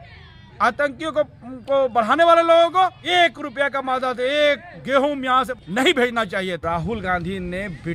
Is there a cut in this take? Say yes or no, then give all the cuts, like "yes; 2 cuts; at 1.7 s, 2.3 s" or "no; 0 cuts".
yes; 3 cuts; at 3.0 s, 5.5 s, 6.6 s